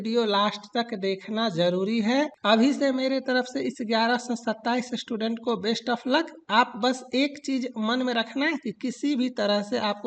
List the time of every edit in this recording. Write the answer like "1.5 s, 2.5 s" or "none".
2.4 s